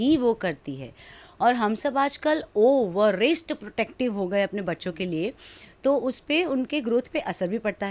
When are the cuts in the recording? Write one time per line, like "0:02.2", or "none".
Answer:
none